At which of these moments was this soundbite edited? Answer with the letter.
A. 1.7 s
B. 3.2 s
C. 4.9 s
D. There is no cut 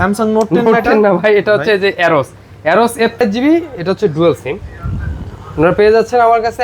B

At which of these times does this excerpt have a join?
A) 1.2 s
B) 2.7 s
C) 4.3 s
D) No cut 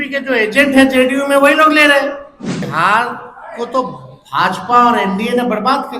B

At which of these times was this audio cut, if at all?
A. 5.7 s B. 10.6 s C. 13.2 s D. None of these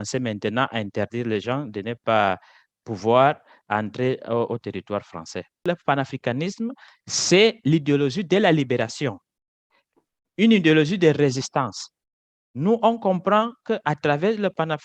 A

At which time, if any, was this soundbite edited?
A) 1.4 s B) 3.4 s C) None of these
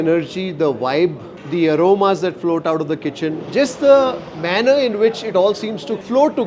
B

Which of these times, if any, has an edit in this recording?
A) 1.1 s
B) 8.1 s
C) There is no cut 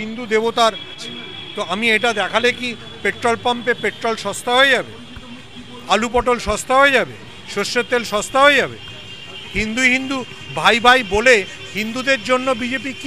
A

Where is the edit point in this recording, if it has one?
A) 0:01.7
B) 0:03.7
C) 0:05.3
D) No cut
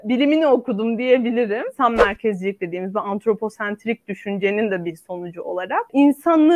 A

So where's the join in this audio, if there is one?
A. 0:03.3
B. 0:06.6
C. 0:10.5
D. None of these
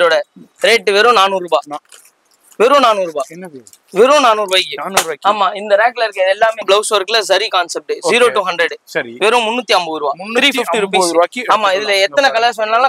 B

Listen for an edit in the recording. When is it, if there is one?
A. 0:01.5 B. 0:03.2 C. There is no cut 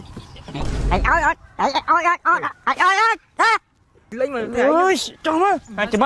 C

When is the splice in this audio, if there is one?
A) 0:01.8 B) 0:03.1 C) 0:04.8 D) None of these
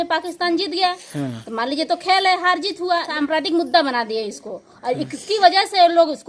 B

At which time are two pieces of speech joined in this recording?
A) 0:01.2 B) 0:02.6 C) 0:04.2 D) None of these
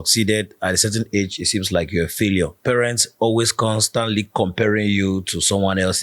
B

